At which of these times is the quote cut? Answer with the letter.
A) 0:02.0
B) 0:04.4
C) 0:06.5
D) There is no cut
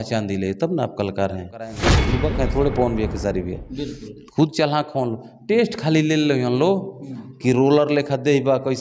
A